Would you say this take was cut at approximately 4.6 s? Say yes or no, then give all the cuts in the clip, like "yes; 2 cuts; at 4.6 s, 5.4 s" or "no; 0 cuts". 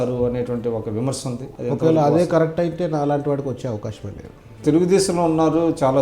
yes; 1 cut; at 4.6 s